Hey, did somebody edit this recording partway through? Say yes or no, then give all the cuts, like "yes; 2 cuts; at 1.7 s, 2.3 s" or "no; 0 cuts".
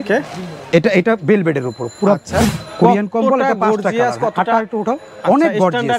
yes; 1 cut; at 2.6 s